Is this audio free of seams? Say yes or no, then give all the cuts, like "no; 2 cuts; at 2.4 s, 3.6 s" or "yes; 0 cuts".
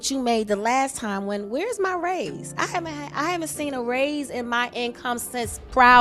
yes; 0 cuts